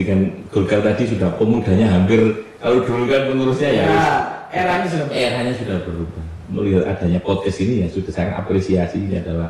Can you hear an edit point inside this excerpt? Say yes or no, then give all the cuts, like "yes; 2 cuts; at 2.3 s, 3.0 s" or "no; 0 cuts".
no; 0 cuts